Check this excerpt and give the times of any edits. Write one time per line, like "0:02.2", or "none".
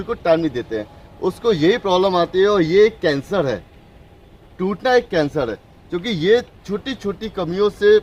none